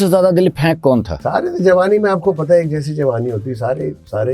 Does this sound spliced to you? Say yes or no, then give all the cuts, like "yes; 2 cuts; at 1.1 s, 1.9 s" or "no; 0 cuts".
yes; 1 cut; at 1.2 s